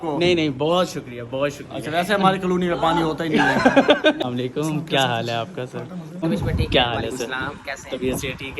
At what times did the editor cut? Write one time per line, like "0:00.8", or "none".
0:04.2
0:06.2